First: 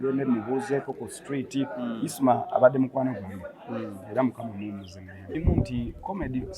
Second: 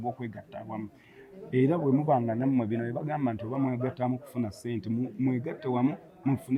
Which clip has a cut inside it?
first; 1 cut; at 5.2 s

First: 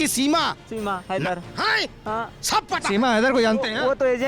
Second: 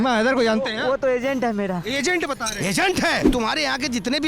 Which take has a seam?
second; 1 cut; at 3.3 s

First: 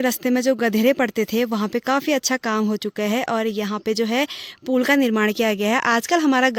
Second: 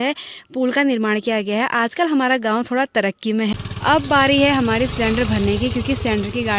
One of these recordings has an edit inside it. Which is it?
second; 1 cut; at 3.5 s

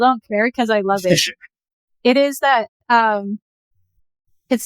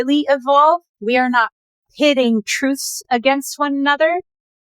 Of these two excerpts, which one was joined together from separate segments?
second; 1 cut; at 0.9 s

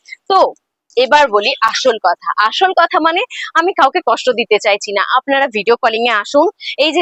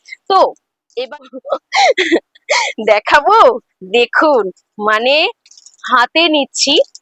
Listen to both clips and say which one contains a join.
second; 1 cut; at 1.1 s

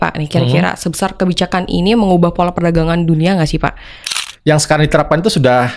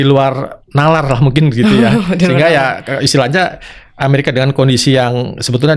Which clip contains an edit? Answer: first; 1 cut; at 4.2 s

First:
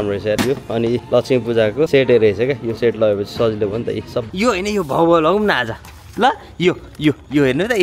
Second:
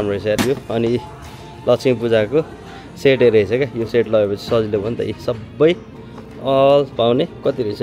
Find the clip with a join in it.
first; 3 cuts; at 1.0 s, 1.9 s, 4.2 s

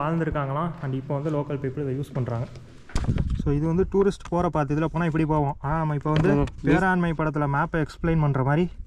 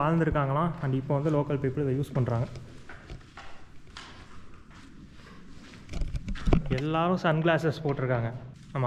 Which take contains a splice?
first; 2 cuts; at 2.9 s, 6.5 s

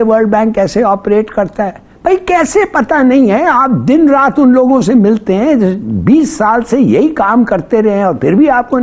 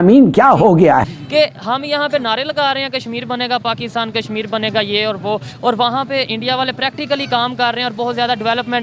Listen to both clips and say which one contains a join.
second; 1 cut; at 1.0 s

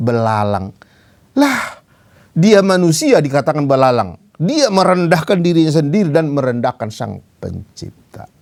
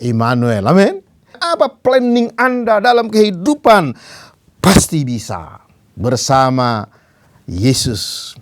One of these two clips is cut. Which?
second; 1 cut; at 1.4 s

